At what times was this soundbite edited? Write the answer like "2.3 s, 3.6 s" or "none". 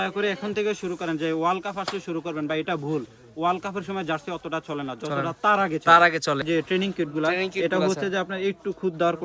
6.4 s